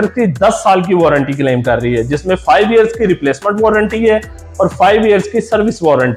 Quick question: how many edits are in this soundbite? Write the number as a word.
zero